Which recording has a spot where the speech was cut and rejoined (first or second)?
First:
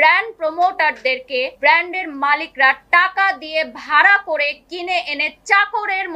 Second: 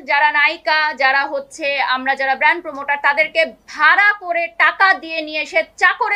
first